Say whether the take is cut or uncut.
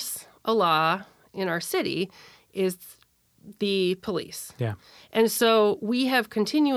uncut